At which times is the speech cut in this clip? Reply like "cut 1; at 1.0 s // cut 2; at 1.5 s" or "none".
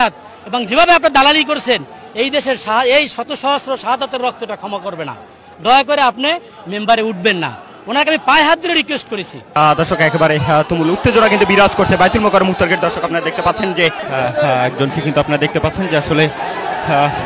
cut 1; at 9.5 s // cut 2; at 14.0 s